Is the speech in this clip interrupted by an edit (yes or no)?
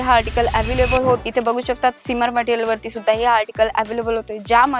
yes